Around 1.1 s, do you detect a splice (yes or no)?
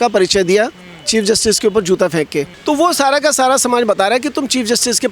no